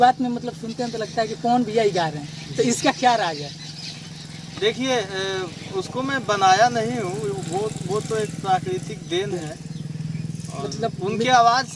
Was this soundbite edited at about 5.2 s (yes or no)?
no